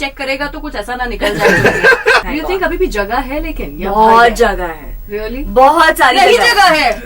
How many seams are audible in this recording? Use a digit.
1